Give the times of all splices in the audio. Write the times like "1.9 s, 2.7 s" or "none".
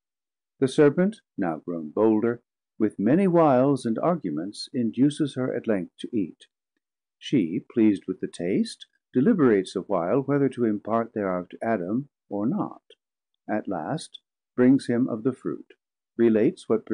6.0 s